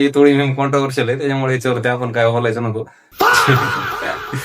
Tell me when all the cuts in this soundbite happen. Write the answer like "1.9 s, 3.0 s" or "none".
3.0 s